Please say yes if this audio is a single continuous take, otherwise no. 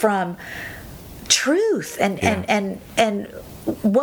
yes